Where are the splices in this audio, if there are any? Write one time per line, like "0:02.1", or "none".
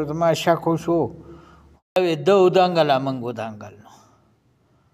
0:02.0